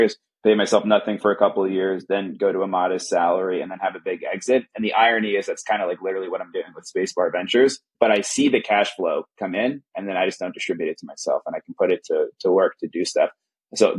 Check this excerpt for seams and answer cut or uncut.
uncut